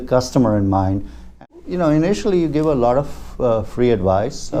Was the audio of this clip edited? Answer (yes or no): yes